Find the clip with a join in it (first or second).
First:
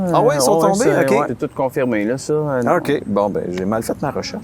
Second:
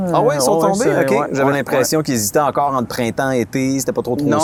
first